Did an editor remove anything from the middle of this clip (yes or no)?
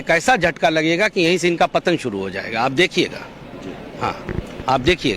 no